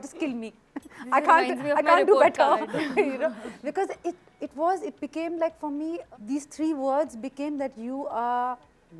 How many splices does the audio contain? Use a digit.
0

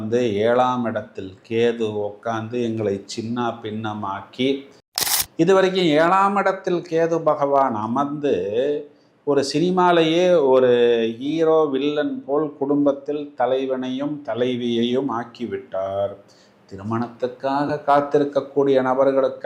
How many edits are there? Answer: 1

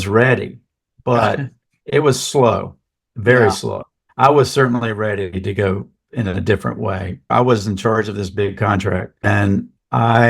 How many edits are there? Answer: 2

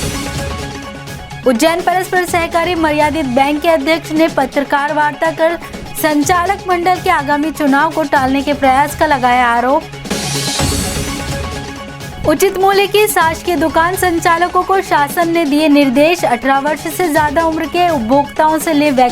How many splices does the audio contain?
1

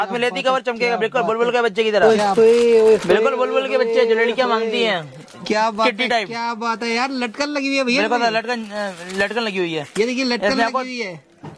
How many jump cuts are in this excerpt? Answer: 1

